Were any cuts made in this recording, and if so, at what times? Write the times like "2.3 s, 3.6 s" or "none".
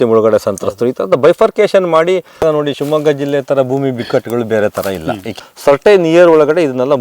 2.3 s, 5.3 s